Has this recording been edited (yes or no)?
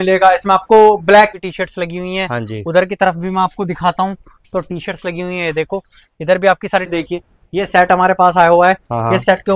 yes